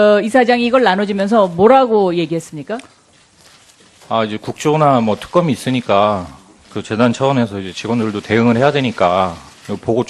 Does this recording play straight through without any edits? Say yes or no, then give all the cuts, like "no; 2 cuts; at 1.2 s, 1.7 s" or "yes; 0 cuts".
no; 1 cut; at 8.8 s